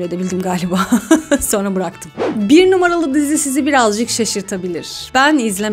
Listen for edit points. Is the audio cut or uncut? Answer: cut